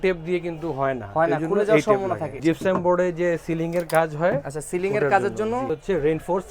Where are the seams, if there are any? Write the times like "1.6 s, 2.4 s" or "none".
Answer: 2.3 s, 5.7 s